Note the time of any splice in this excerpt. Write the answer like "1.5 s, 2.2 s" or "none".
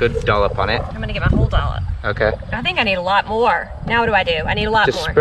0.9 s